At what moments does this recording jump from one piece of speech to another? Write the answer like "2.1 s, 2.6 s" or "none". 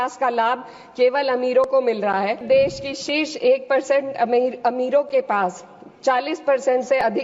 2.4 s